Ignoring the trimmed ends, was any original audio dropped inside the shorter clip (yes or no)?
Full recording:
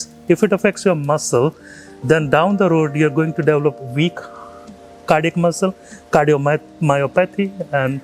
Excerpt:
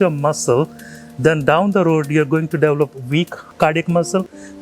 yes